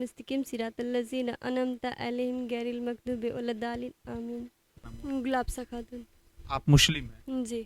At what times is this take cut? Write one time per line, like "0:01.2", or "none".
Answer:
0:04.9